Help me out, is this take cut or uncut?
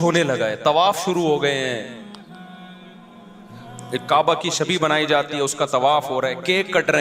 uncut